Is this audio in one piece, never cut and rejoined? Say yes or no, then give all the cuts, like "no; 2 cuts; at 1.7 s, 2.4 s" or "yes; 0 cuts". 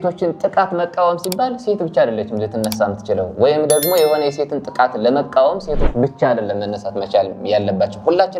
yes; 0 cuts